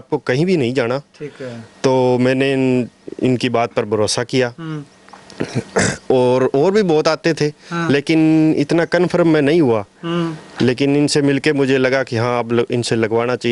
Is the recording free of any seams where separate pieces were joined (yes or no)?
yes